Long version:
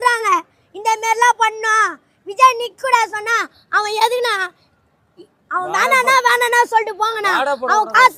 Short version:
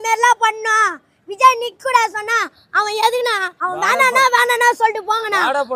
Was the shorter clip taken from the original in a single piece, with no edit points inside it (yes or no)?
no